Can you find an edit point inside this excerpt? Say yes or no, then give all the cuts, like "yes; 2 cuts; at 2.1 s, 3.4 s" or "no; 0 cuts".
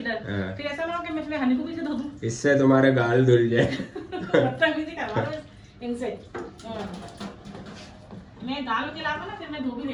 no; 0 cuts